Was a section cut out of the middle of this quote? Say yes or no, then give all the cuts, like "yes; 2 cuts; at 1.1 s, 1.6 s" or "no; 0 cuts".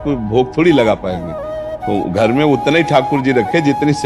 no; 0 cuts